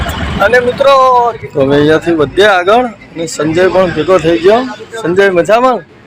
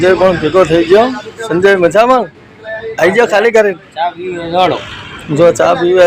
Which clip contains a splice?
first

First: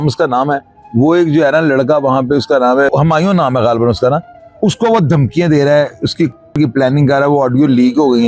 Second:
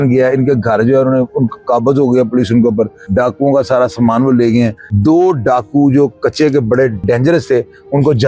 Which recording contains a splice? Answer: second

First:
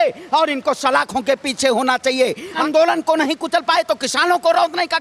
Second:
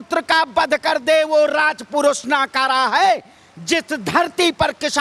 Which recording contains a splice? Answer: first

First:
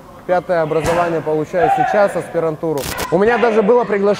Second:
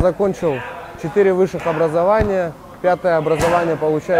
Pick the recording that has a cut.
first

